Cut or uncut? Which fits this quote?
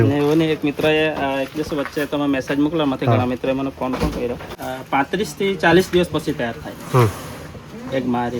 cut